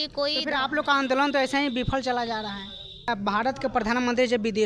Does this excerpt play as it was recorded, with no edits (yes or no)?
no